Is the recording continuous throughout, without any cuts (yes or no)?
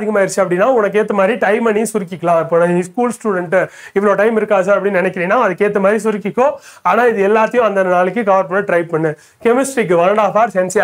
yes